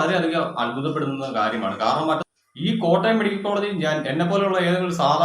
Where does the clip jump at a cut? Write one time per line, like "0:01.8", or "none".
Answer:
0:02.2